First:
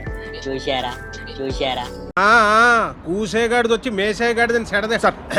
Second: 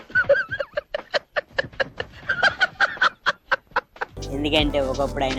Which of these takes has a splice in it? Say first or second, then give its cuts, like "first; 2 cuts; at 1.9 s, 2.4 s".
second; 1 cut; at 4.1 s